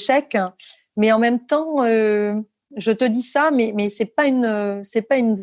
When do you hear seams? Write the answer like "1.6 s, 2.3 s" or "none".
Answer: none